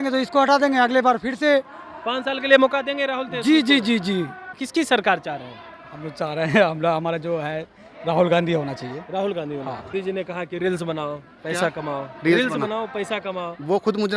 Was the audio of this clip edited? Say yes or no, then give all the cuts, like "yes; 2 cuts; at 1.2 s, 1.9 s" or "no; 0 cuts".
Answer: yes; 2 cuts; at 4.6 s, 9.9 s